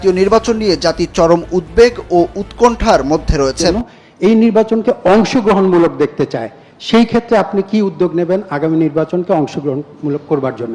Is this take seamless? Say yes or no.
no